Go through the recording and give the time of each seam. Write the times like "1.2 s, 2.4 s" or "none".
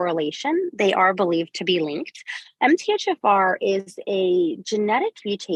none